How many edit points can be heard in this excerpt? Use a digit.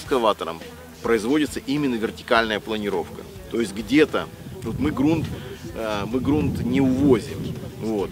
1